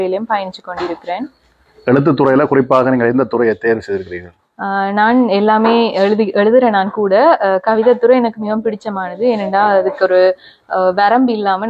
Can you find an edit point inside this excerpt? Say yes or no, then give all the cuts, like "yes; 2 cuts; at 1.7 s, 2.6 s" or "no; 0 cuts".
no; 0 cuts